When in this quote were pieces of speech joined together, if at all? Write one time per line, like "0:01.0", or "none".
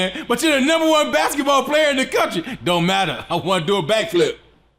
none